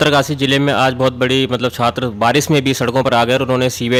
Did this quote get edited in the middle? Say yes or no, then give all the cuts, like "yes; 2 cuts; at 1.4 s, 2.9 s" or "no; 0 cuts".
no; 0 cuts